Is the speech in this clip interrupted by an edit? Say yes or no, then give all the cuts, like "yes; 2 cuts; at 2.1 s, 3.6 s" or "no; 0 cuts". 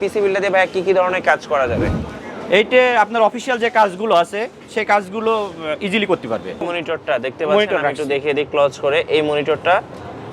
yes; 1 cut; at 6.7 s